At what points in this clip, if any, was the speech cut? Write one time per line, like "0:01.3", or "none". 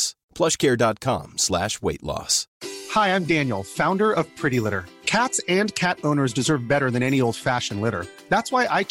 0:02.4

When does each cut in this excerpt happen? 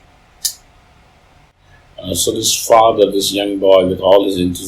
0:01.5

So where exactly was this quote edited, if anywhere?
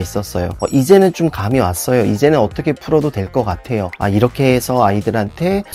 0:03.9

